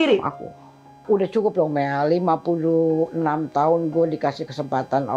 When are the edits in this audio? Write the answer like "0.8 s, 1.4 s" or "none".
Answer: 1.0 s